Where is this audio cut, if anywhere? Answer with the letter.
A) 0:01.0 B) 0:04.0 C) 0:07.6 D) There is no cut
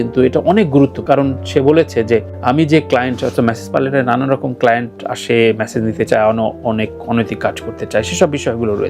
A